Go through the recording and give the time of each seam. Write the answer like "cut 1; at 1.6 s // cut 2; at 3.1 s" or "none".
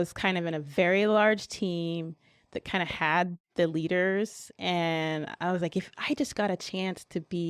none